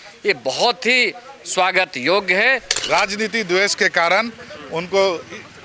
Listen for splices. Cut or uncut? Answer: cut